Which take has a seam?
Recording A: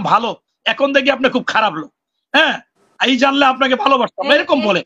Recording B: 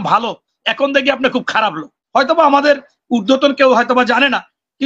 B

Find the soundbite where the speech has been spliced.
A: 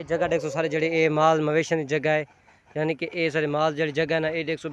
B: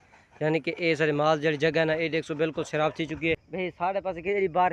B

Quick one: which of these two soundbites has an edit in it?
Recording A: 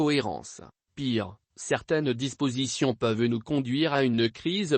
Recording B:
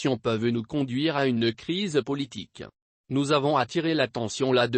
A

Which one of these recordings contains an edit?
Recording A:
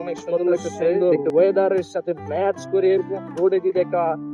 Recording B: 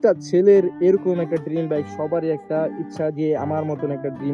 A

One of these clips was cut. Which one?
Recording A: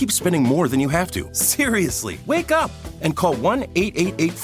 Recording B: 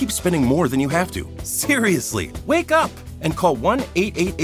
A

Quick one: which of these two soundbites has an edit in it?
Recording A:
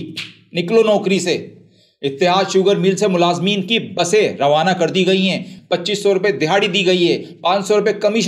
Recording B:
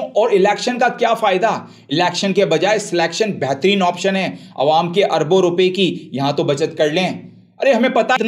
A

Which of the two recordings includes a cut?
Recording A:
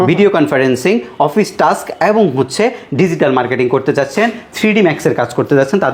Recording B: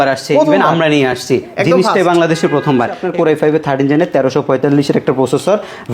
B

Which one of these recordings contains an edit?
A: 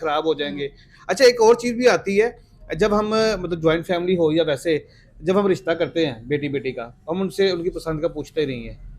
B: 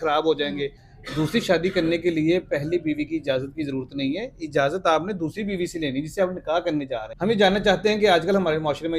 B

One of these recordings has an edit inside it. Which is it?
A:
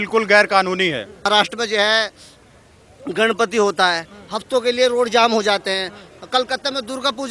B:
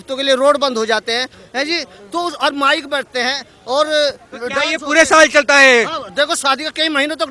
A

